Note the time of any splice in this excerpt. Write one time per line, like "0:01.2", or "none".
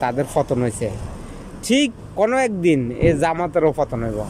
0:02.0